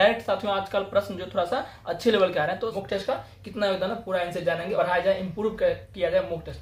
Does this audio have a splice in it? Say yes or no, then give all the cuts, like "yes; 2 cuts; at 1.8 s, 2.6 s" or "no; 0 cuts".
yes; 2 cuts; at 2.8 s, 4.7 s